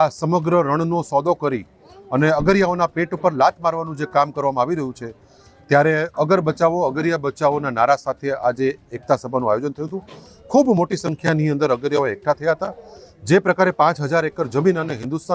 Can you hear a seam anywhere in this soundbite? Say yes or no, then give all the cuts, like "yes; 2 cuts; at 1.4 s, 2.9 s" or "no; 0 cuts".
no; 0 cuts